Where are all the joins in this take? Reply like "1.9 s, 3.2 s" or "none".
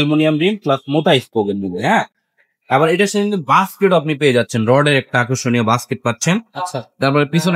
none